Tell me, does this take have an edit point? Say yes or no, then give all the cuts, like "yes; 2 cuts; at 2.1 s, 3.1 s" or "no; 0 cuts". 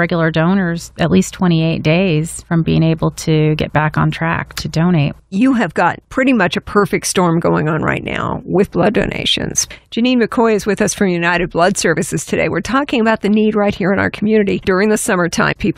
yes; 2 cuts; at 9.8 s, 14.6 s